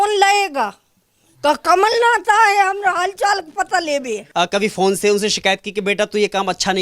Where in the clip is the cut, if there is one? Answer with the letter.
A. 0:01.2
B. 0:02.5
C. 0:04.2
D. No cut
C